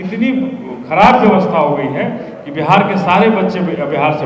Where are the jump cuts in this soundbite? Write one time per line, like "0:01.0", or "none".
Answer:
none